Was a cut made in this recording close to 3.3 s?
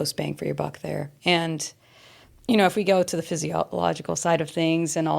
no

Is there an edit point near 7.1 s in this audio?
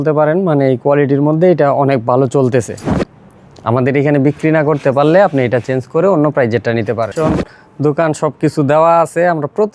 yes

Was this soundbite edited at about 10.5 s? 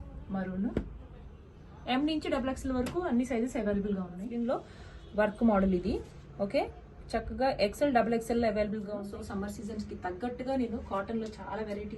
no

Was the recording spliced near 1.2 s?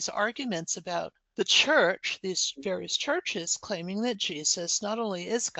yes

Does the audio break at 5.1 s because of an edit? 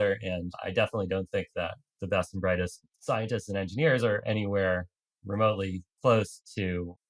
no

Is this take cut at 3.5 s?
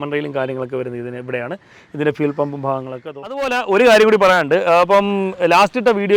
yes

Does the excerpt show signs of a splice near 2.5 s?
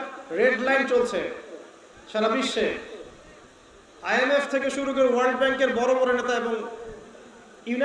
no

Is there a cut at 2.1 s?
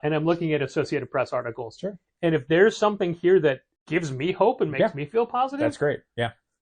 no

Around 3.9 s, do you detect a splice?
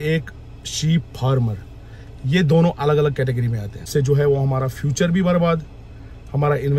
yes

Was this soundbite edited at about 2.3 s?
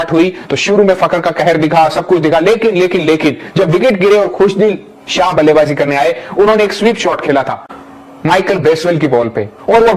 no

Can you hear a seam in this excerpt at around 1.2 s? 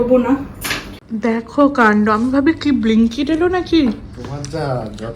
yes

